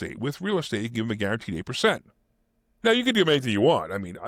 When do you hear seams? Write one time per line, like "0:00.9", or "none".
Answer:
none

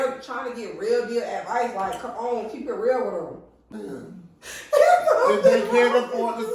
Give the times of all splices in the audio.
0:03.6

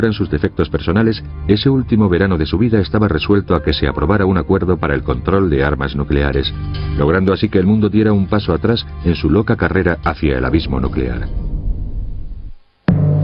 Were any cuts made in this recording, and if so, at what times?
0:02.6

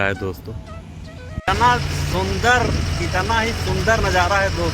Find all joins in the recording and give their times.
0:01.5

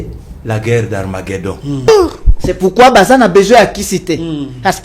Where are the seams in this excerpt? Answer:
0:01.9

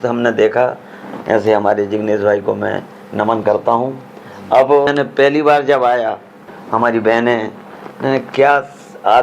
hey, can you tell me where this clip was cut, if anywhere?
0:04.9
0:06.5

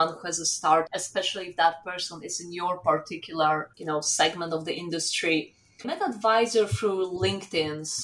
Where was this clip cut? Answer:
0:00.9
0:03.7
0:05.8

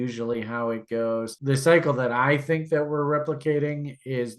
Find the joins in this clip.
0:01.3

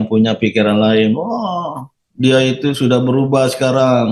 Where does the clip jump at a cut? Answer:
none

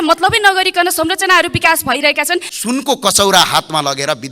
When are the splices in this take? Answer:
0:02.5

